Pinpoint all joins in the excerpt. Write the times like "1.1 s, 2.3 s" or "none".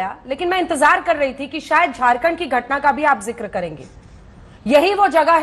none